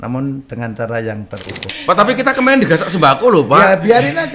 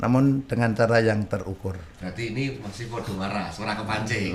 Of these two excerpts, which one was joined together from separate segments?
first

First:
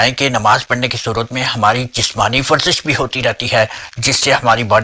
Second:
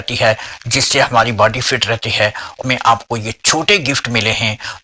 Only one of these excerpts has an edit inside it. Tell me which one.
second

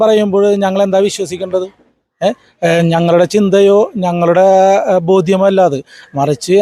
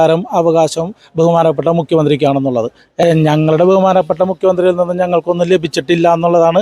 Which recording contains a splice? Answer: second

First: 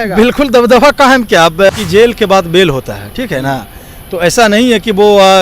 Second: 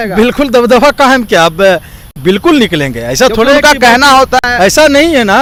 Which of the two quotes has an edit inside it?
first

